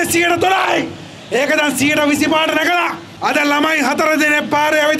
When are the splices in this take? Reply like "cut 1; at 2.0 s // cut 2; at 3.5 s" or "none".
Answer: cut 1; at 3.1 s